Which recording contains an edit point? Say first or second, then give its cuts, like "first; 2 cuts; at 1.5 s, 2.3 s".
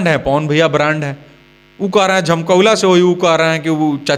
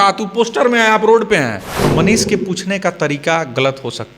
second; 1 cut; at 1.8 s